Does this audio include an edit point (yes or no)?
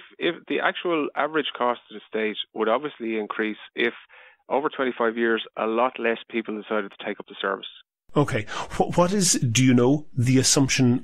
no